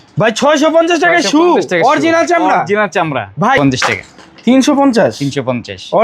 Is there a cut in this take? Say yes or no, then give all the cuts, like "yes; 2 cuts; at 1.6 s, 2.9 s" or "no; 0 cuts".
yes; 1 cut; at 3.6 s